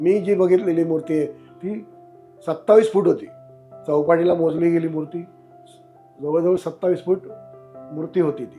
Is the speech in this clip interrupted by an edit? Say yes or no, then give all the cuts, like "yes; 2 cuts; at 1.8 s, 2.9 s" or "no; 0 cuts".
no; 0 cuts